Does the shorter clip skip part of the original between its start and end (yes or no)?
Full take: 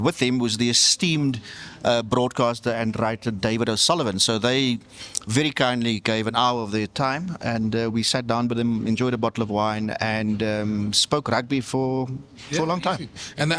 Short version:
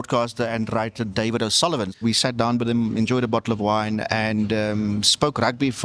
yes